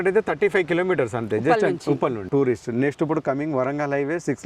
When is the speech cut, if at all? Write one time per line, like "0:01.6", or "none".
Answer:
0:02.3

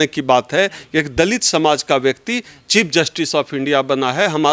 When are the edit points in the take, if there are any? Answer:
none

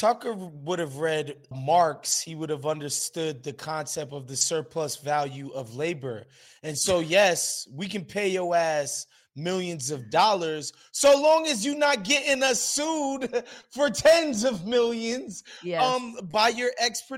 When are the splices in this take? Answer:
0:01.5
0:03.0

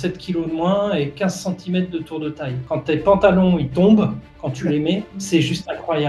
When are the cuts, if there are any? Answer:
0:02.6

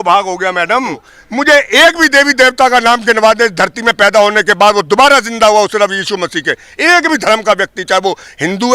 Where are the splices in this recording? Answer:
0:01.1

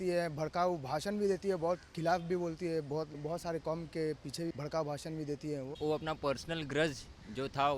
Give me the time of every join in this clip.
0:03.2
0:04.5
0:05.7

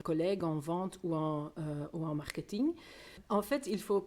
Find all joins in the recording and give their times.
none

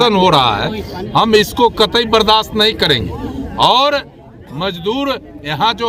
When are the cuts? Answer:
none

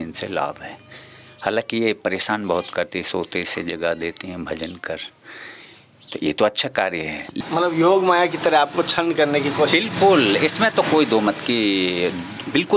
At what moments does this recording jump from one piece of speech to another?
0:07.3

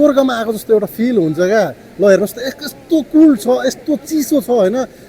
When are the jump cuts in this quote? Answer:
none

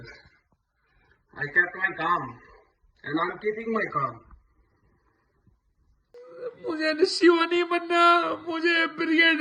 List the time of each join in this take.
0:06.2

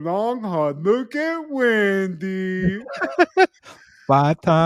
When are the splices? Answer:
none

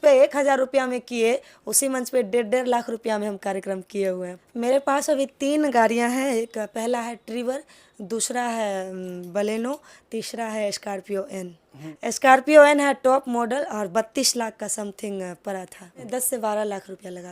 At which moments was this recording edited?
0:04.4
0:11.8
0:16.0

